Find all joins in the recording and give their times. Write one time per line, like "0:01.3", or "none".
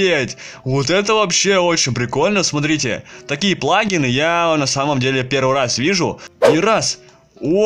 0:06.3